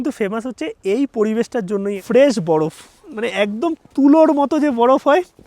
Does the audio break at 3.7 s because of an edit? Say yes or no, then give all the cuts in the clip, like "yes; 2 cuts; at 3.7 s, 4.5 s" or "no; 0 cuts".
no; 1 cut; at 2.0 s